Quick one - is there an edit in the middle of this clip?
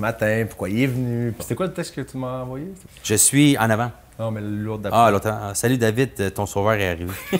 yes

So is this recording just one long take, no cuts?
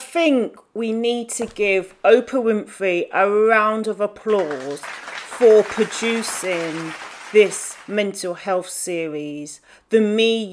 yes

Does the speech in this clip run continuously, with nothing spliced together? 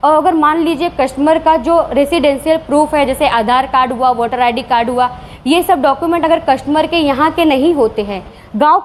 yes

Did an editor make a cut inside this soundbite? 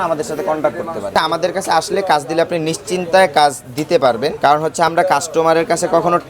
yes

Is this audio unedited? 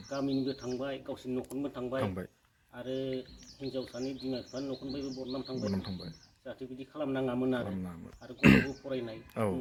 yes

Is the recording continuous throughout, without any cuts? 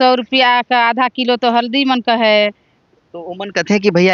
yes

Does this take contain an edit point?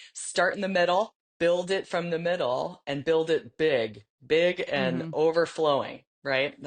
yes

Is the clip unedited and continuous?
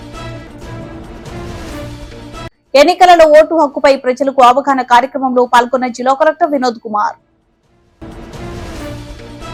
yes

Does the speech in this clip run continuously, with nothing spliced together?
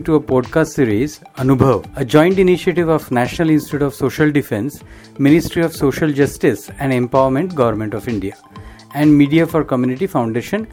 no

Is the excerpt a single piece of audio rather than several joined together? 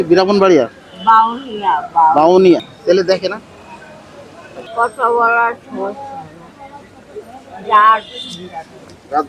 no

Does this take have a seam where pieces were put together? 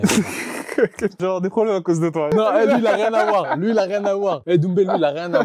yes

